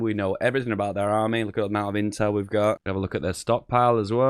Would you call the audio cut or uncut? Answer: cut